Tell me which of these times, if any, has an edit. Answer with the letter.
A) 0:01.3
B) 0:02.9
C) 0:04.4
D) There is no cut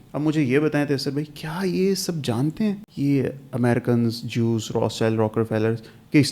B